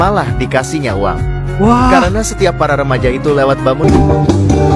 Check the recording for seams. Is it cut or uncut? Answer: cut